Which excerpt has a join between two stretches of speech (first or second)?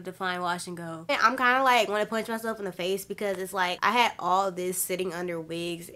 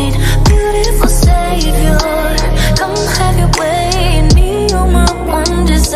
first